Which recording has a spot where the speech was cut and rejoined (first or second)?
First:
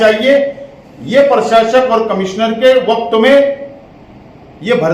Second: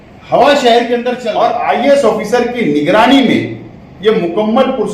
second